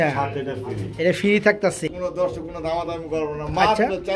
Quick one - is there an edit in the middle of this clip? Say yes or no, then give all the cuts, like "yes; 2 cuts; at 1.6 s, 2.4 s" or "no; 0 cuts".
yes; 1 cut; at 1.9 s